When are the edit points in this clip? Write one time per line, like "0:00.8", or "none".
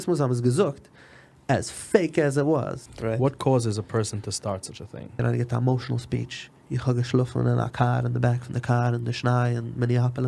0:02.8
0:05.2

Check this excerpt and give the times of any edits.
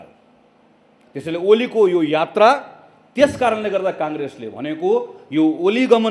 none

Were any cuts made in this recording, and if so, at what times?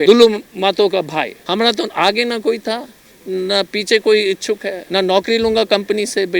0:01.4
0:04.8

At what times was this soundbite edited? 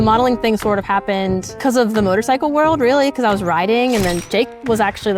0:01.5
0:04.2

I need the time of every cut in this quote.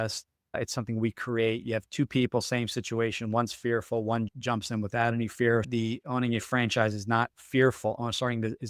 none

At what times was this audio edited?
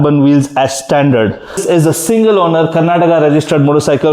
0:01.6

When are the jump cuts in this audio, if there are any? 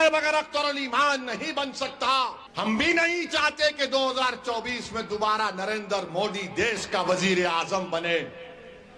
0:02.4

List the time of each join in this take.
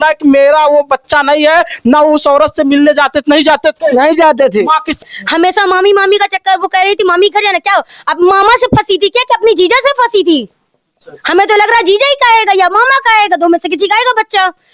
0:05.0

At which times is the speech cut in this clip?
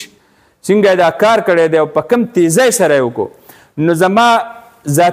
none

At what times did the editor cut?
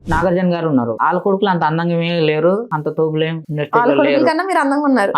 0:01.0
0:02.7
0:03.4

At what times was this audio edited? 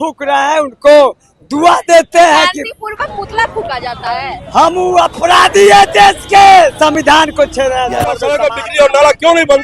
0:08.3

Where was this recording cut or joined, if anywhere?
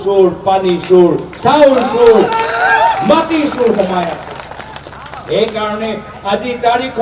none

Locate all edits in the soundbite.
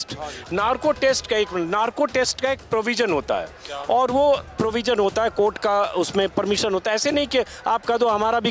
none

